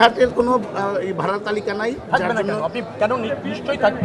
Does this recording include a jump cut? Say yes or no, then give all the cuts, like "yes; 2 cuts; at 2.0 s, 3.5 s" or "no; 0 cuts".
no; 0 cuts